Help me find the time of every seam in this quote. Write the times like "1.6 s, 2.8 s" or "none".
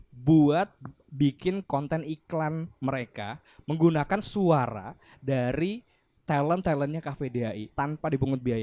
7.7 s